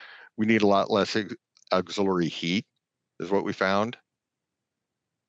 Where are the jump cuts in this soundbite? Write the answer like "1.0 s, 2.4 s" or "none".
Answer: none